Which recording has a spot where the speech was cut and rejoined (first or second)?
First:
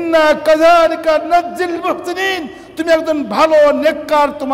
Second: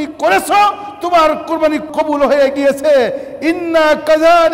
second